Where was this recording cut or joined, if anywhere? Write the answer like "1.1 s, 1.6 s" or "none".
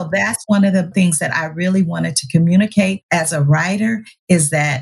0.9 s, 3.0 s